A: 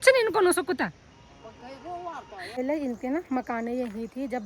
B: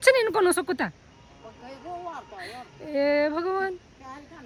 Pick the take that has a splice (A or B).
A